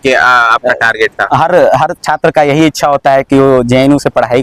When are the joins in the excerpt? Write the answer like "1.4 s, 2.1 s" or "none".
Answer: none